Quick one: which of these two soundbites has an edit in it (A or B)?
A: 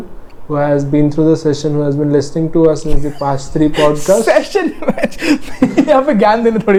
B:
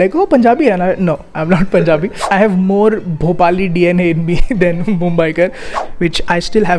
B